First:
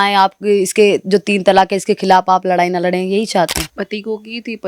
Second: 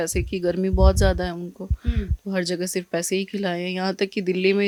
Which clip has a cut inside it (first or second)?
first